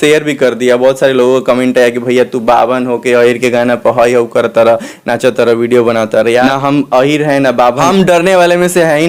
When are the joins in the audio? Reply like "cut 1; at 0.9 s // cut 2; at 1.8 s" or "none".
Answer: cut 1; at 6.4 s // cut 2; at 7.8 s

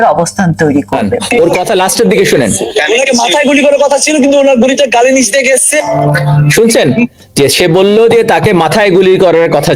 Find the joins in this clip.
cut 1; at 1.1 s

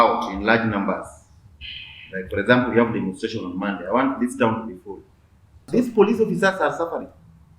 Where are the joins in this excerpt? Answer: cut 1; at 5.7 s

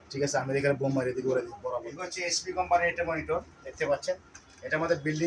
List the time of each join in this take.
cut 1; at 2.0 s

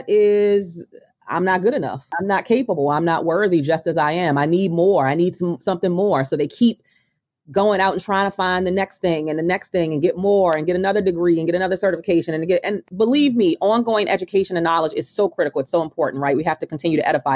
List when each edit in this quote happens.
cut 1; at 2.1 s // cut 2; at 12.8 s

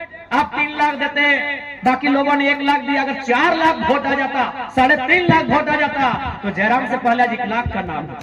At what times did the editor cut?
none

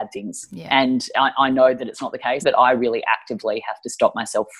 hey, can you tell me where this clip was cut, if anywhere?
cut 1; at 2.4 s

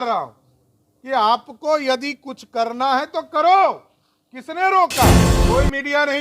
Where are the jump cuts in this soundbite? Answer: cut 1; at 5.3 s

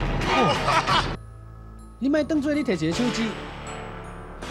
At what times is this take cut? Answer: cut 1; at 1.1 s

